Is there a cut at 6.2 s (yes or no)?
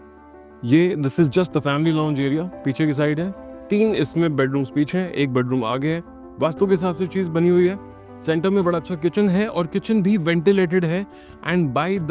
no